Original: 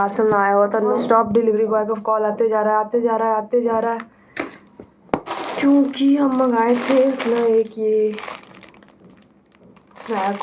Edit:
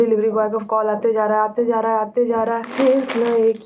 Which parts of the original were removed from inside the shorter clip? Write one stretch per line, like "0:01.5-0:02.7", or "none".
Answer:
0:04.1-0:06.8

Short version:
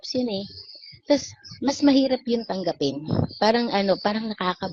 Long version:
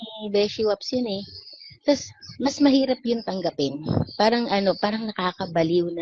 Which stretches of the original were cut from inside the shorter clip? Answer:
none

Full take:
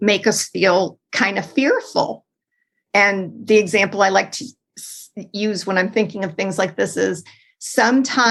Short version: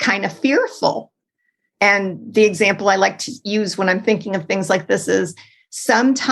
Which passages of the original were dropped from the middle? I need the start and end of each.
0:04.4-0:05.2

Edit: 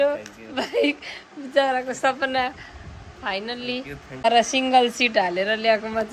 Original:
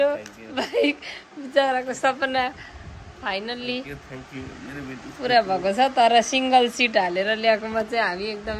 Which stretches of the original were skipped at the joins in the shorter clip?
0:04.3-0:06.0

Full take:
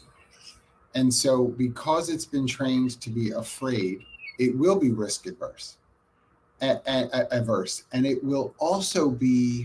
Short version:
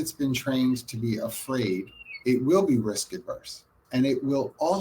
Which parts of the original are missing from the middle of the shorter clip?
0:05.9-0:07.8

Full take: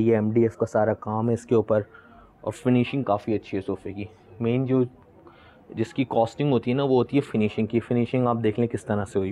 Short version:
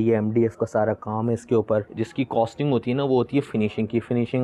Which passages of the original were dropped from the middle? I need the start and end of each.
0:01.9-0:05.7

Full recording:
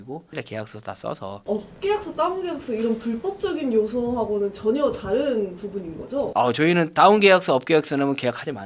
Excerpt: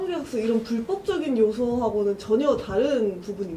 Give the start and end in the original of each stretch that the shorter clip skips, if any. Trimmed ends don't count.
none

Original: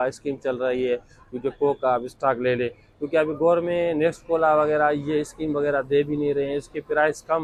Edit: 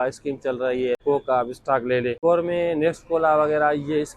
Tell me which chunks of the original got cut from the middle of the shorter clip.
0:01.0-0:01.6
0:02.7-0:03.4

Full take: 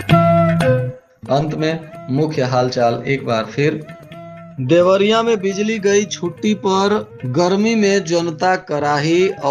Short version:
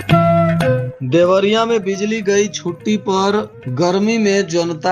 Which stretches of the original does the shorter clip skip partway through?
0:00.9-0:04.5

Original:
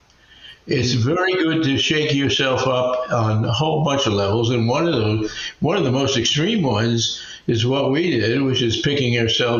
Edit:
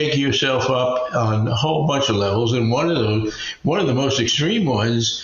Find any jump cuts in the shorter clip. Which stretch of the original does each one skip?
none

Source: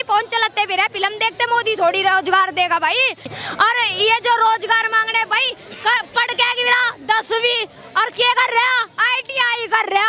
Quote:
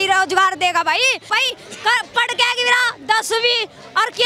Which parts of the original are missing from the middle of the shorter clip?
0:03.2-0:05.3

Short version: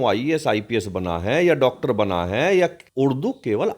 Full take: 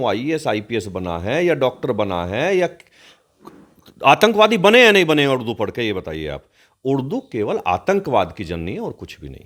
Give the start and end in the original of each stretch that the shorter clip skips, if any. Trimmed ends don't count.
0:02.8-0:06.7

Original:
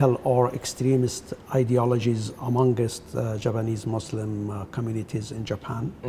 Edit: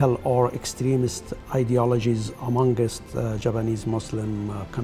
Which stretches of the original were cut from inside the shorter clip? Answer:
none

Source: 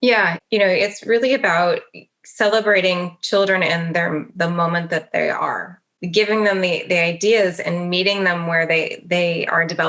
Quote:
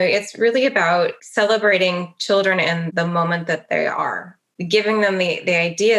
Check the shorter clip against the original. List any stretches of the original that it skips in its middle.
0:01.9-0:02.3
0:03.9-0:04.3

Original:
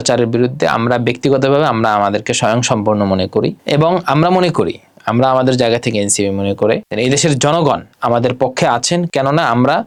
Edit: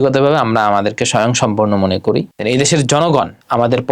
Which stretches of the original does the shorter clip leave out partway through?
0:03.6-0:06.8

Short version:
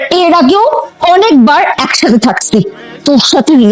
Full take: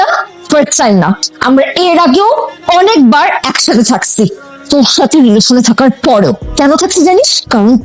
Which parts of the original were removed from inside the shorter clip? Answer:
none

